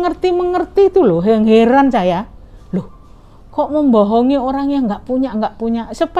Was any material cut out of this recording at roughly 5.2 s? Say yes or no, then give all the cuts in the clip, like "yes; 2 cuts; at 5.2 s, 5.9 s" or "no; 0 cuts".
no; 0 cuts